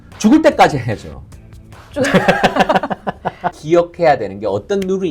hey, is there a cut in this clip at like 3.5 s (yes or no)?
yes